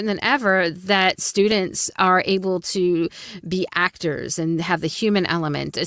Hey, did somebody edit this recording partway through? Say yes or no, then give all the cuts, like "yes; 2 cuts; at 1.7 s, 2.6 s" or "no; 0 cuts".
no; 0 cuts